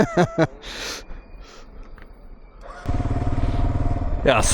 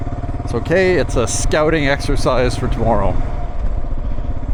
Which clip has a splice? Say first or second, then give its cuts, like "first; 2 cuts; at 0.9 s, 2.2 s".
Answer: first; 1 cut; at 2.9 s